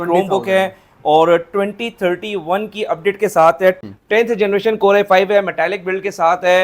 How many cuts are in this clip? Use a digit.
1